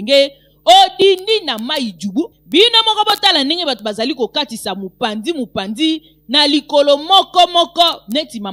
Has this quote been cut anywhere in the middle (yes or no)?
no